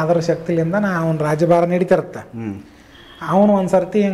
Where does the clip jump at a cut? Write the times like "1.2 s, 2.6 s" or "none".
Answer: none